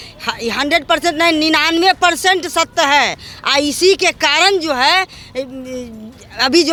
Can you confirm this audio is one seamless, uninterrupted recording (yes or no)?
yes